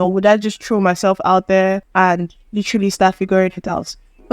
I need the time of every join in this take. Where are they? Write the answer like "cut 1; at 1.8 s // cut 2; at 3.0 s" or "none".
cut 1; at 1.8 s